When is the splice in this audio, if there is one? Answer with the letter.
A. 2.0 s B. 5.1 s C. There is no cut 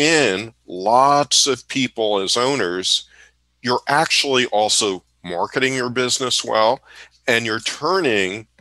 C